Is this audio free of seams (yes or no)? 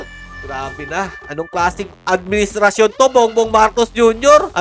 yes